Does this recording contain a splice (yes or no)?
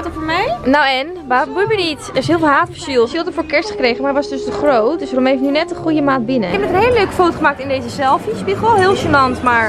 yes